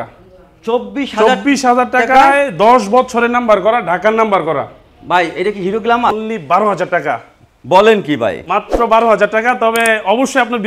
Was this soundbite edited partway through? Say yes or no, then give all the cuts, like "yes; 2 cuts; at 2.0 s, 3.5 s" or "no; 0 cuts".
yes; 1 cut; at 6.1 s